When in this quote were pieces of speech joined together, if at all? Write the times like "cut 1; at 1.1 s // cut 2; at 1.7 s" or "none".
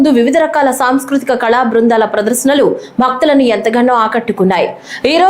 cut 1; at 3.9 s